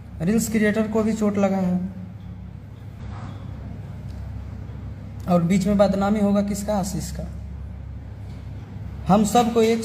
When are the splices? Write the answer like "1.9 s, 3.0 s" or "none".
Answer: 3.0 s

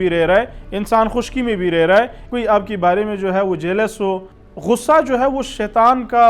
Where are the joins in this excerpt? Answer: 2.2 s, 4.3 s

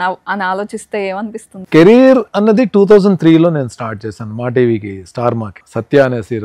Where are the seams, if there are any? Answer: 1.5 s

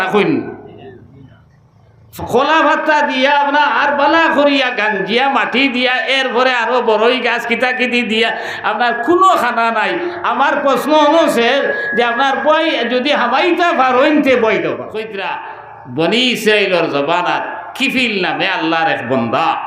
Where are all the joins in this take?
15.2 s

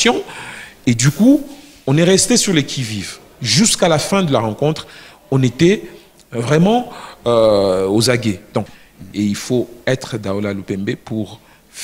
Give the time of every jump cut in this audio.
8.8 s

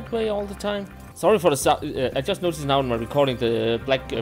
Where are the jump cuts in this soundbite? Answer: 1.0 s

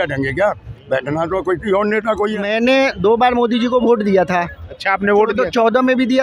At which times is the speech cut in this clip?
2.5 s

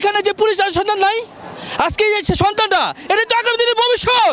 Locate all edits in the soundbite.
none

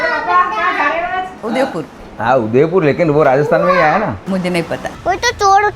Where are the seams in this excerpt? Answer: 1.5 s, 4.8 s

